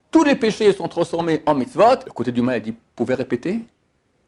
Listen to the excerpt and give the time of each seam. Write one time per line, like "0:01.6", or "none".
0:02.0

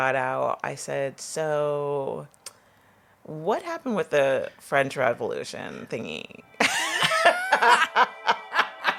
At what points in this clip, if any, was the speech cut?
none

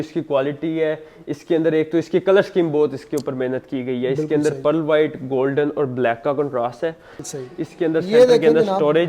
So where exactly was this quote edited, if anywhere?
0:07.2

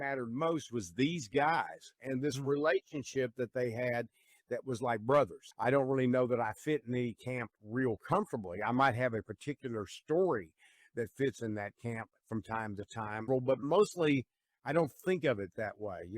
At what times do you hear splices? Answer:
0:05.4
0:13.3

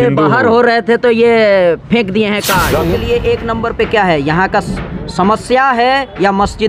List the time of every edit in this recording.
0:02.8

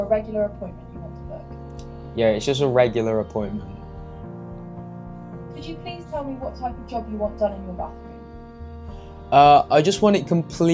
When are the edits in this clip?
0:03.7
0:05.9

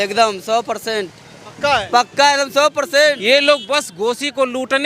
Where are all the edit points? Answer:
0:03.2

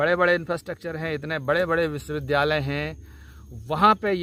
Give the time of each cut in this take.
none

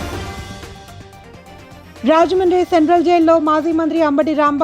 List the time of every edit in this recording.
0:01.0

